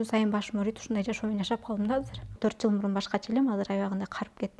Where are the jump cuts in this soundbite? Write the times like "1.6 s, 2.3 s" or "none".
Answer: 2.2 s